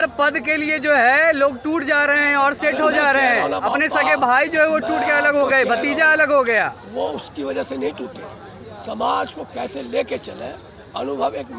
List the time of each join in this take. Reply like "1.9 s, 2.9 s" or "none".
none